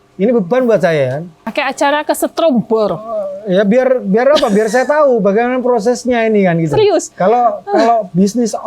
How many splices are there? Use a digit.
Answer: 1